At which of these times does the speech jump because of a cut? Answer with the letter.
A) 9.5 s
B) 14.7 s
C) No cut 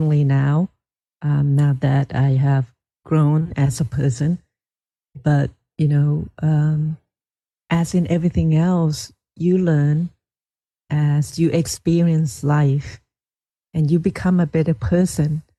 C